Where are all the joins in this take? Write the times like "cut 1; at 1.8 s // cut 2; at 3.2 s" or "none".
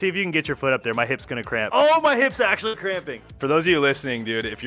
cut 1; at 1.7 s // cut 2; at 3.3 s